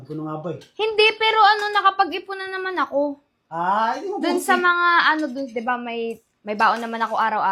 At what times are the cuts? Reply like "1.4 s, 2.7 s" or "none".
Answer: none